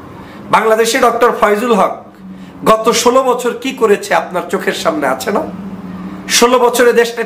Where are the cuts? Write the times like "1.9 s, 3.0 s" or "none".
none